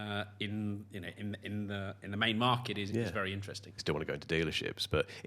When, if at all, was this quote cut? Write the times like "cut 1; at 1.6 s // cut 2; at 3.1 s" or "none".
cut 1; at 3.8 s